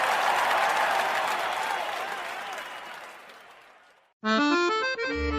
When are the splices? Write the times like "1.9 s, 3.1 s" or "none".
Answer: 1.3 s